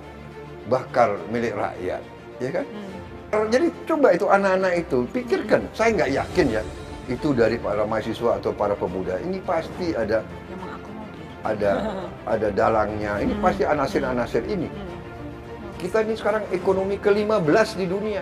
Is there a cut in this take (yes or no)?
yes